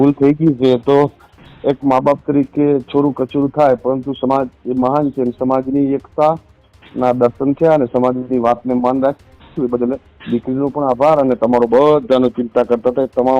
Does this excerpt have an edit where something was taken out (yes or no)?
no